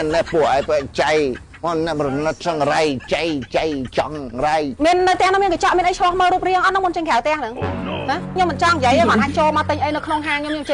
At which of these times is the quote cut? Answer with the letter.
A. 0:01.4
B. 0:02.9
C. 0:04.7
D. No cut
C